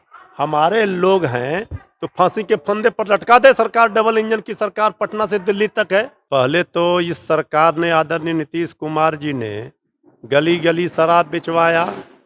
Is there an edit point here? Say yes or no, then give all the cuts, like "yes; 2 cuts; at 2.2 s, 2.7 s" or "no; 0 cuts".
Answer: yes; 1 cut; at 6.2 s